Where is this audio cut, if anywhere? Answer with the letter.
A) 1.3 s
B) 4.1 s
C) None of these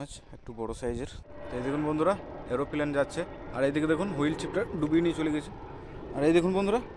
A